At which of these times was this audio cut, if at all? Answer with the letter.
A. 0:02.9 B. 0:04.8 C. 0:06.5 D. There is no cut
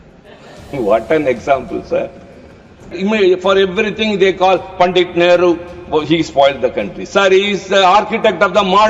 A